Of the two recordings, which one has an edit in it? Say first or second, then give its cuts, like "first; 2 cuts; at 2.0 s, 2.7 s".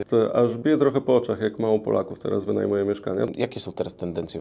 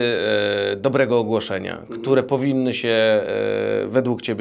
first; 1 cut; at 3.3 s